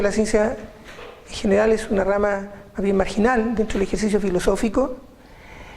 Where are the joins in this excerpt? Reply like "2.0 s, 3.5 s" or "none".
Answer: 1.9 s